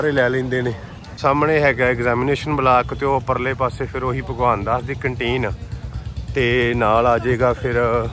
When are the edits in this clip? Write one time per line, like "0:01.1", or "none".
none